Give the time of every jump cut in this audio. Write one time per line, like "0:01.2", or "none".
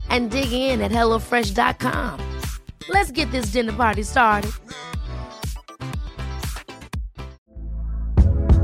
0:07.4